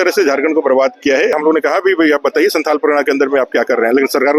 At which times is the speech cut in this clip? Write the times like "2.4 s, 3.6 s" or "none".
1.3 s